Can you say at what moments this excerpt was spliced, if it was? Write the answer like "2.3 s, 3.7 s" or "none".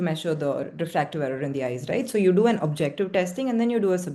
none